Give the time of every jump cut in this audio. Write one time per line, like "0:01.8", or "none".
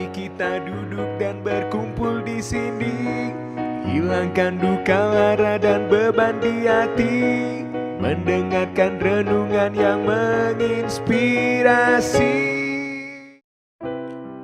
0:13.2